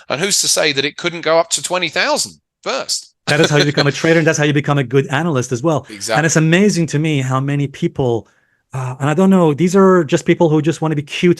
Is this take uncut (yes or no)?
no